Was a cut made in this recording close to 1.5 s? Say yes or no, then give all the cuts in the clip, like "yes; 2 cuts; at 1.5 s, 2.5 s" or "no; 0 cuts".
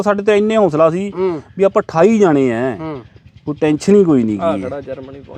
no; 0 cuts